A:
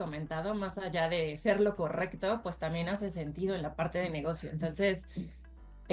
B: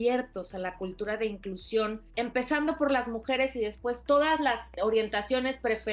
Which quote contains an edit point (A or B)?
B